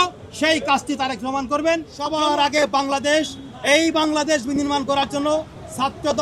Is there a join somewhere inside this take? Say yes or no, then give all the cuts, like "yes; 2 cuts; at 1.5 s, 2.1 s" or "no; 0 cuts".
yes; 1 cut; at 2.1 s